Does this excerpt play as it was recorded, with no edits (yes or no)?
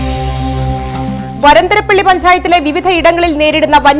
no